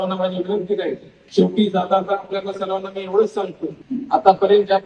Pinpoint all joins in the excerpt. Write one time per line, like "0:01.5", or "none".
0:01.1
0:03.8